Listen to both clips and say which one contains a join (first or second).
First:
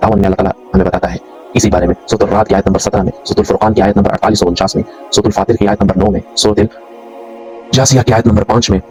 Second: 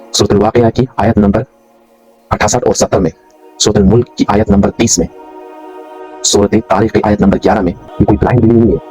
second